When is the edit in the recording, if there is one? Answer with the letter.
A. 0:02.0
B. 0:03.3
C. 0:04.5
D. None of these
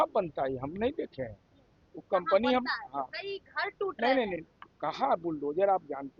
D